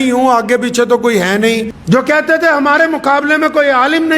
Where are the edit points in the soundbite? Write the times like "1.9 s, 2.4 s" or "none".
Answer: 1.7 s